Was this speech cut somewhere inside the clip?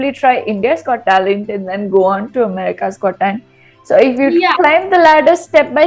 no; 0 cuts

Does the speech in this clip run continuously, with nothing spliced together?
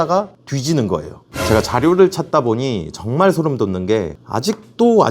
no; 1 cut; at 1.3 s

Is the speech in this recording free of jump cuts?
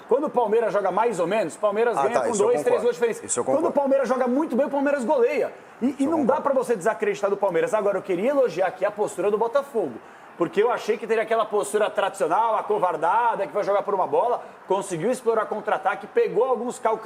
yes; 0 cuts

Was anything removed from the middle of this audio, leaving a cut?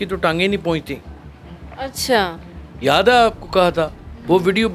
no; 0 cuts

